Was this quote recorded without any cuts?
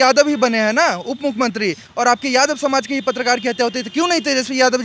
yes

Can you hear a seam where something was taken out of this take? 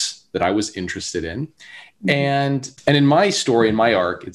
yes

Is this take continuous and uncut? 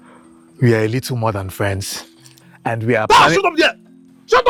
yes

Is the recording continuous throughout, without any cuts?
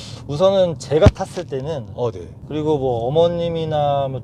no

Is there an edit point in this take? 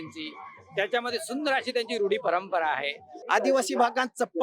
yes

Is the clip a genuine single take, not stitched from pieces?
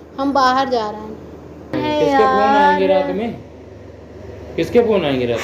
no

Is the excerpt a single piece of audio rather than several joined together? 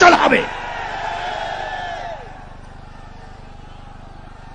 yes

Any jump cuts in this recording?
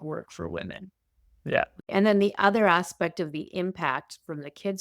yes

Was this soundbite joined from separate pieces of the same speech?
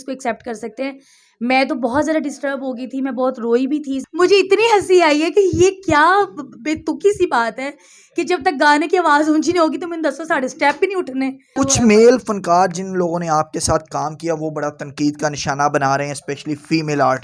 yes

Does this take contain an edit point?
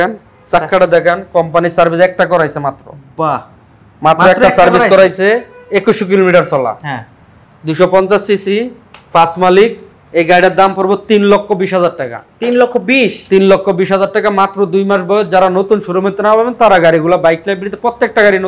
no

